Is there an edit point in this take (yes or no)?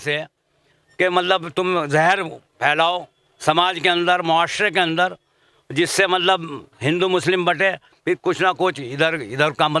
no